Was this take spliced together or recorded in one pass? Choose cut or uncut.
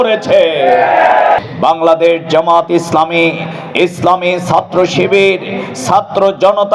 cut